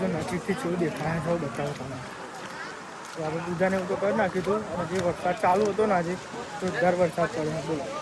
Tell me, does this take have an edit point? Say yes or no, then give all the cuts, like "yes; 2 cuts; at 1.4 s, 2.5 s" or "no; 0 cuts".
no; 0 cuts